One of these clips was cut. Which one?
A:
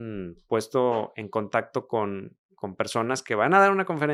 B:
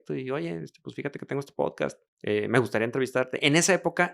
B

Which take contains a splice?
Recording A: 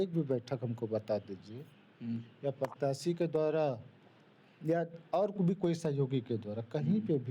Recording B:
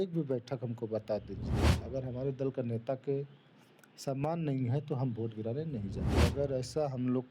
B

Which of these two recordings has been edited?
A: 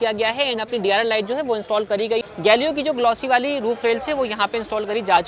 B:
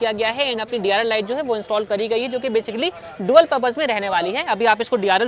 A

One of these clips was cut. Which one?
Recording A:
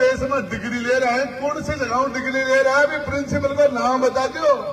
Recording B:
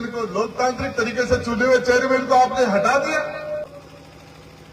B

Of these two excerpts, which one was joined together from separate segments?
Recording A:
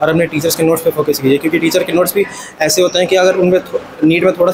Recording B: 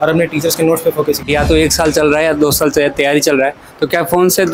B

